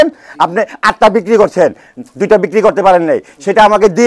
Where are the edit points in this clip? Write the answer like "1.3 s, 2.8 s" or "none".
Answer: none